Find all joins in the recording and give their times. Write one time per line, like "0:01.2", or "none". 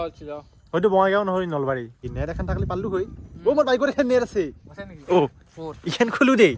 0:02.0